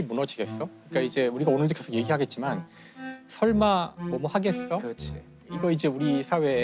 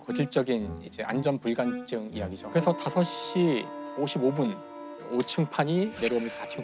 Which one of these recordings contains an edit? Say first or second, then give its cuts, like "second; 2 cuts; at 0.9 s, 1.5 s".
second; 1 cut; at 2.4 s